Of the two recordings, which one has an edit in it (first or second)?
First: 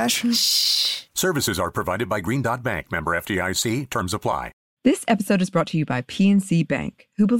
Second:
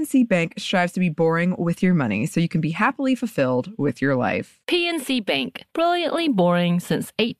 first